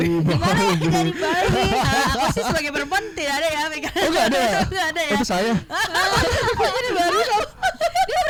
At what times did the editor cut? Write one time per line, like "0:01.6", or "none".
none